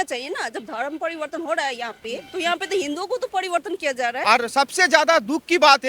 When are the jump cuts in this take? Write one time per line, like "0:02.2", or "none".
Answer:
0:02.2
0:04.2